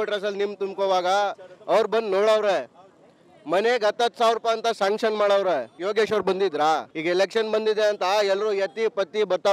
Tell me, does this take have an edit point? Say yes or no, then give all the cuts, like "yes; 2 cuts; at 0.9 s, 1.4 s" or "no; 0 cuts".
yes; 2 cuts; at 5.7 s, 6.9 s